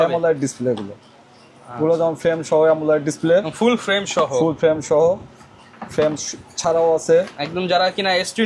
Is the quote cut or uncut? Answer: uncut